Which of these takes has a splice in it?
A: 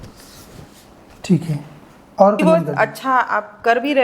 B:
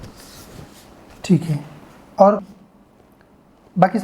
A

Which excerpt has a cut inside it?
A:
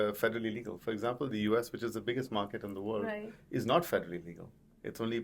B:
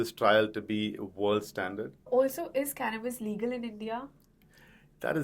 B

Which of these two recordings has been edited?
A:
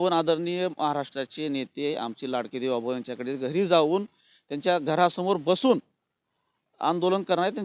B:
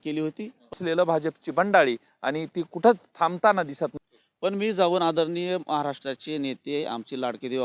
B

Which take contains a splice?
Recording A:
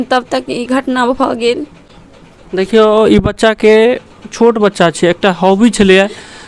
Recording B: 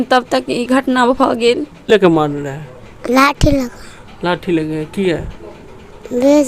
B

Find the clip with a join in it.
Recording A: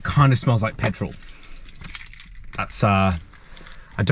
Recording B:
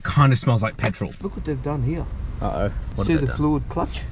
B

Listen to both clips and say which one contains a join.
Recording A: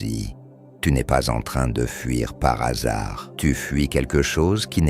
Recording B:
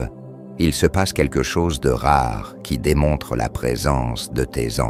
A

